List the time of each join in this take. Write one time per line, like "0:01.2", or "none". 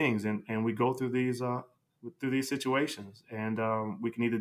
none